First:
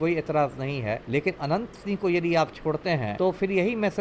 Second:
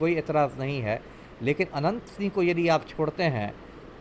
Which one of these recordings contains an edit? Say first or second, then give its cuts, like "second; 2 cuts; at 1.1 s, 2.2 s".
first; 2 cuts; at 1.0 s, 3.1 s